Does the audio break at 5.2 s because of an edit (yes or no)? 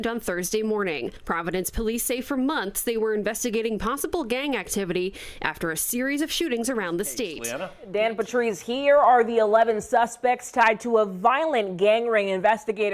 no